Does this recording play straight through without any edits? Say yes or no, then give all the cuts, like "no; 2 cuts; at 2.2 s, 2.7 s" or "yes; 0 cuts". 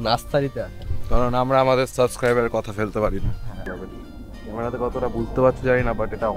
no; 1 cut; at 3.7 s